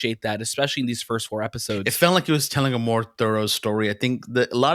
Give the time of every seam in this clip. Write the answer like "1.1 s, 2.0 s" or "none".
1.9 s